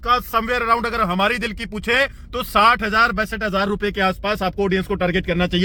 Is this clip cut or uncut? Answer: uncut